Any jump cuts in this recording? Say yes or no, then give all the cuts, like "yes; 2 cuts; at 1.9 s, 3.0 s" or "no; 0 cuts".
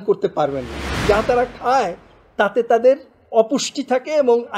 yes; 1 cut; at 1.0 s